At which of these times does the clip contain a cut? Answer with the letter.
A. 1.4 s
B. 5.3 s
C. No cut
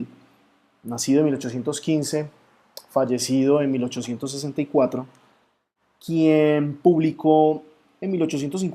A